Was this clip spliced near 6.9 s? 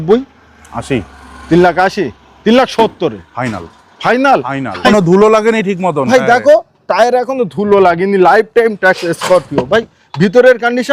no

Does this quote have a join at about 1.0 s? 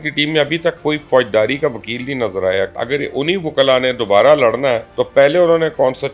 no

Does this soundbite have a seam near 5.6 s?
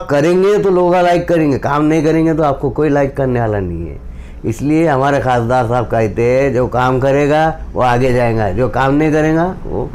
no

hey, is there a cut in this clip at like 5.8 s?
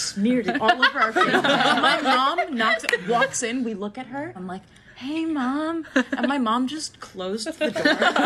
no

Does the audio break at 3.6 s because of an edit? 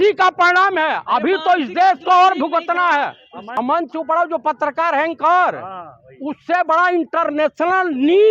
yes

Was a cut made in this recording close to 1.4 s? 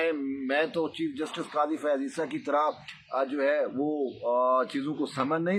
no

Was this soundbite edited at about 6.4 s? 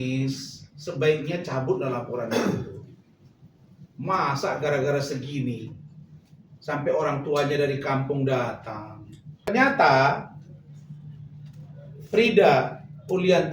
no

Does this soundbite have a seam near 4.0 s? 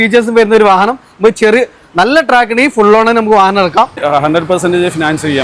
yes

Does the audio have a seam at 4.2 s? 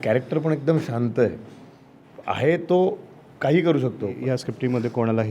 yes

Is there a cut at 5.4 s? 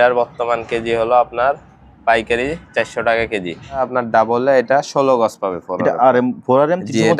no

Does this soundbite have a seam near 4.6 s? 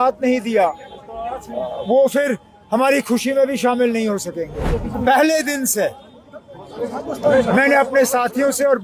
yes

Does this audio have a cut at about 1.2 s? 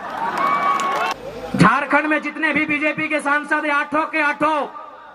yes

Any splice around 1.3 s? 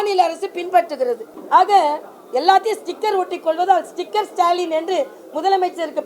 yes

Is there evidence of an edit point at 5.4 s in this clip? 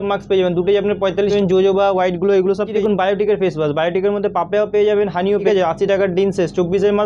yes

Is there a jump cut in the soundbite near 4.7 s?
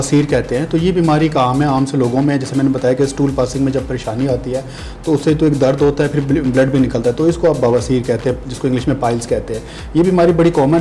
no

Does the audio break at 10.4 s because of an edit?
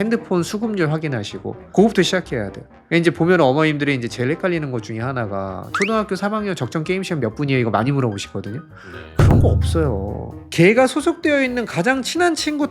yes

